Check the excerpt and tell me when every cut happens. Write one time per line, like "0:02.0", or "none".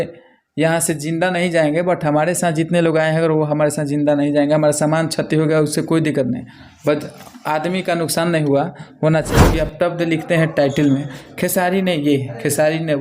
0:09.3

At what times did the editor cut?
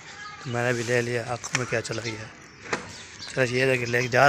none

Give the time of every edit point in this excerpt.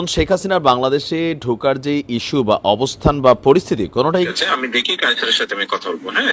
0:04.3

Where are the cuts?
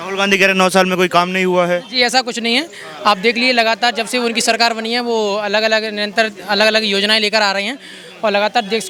none

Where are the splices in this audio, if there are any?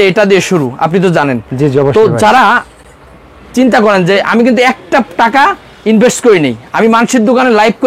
none

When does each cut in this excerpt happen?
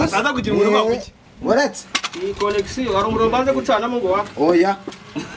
none

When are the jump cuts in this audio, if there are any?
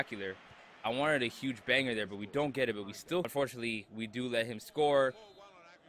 0:03.3

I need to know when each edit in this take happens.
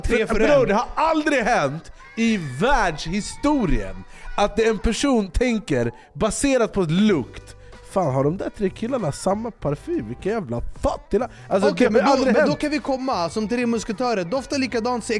none

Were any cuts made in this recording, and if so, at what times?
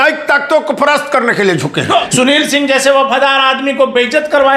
0:02.1

